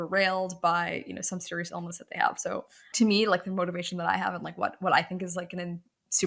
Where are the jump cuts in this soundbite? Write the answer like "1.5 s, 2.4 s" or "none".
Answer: 2.8 s